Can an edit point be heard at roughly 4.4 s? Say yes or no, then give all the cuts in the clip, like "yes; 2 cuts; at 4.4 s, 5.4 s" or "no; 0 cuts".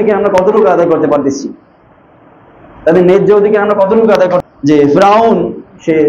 yes; 1 cut; at 4.4 s